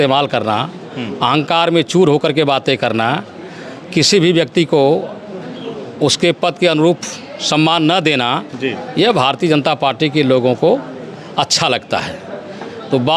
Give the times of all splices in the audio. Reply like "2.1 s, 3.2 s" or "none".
none